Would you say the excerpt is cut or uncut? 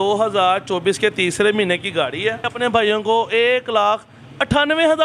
cut